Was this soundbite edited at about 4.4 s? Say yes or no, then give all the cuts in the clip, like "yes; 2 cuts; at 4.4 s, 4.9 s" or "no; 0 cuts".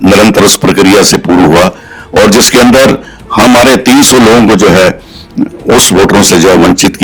no; 0 cuts